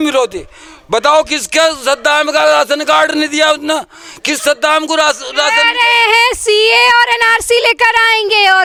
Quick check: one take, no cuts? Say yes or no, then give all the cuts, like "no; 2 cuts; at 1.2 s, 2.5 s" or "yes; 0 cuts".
yes; 0 cuts